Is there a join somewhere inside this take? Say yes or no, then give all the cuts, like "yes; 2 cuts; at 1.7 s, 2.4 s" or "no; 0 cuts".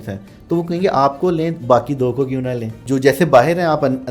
yes; 1 cut; at 2.8 s